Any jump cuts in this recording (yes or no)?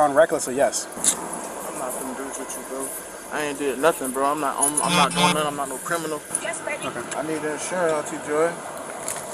yes